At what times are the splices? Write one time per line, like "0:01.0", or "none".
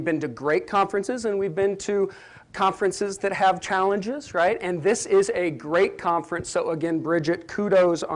0:06.3

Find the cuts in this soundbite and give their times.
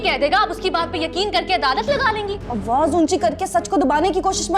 0:02.5

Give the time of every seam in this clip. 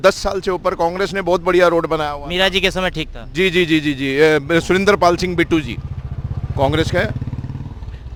none

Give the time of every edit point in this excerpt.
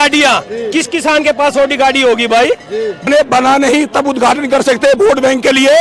0:03.0

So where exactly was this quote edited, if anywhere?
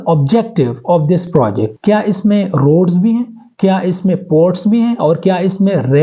0:01.7

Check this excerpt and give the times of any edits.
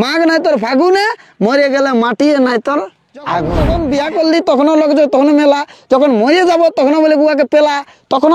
0:03.6

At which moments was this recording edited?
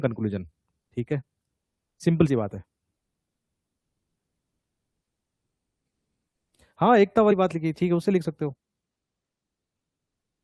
none

